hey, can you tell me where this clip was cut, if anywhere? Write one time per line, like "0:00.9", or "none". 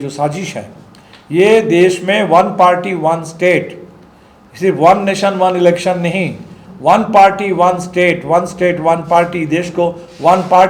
none